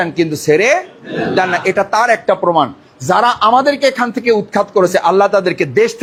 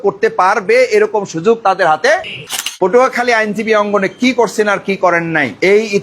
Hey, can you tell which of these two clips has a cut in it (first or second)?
second